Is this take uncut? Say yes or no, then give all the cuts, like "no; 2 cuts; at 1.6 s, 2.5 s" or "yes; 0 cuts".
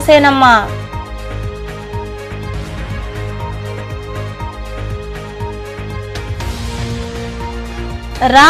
yes; 0 cuts